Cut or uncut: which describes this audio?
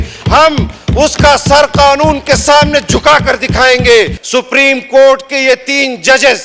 cut